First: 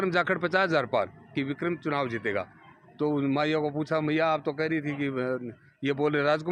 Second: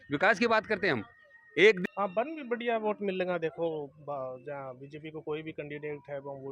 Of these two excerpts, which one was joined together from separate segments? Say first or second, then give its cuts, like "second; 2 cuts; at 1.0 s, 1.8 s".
second; 1 cut; at 1.8 s